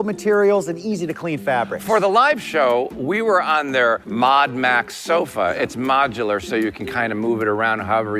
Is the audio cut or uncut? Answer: uncut